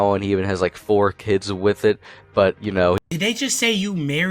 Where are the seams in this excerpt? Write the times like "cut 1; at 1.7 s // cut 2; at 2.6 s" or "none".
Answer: cut 1; at 3.0 s